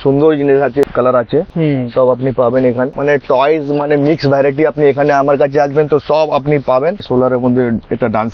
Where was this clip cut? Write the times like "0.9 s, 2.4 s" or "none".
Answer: 0.8 s, 7.1 s